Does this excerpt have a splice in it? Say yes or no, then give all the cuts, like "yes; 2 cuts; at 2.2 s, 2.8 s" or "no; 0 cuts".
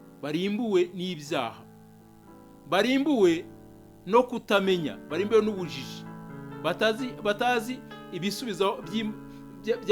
no; 0 cuts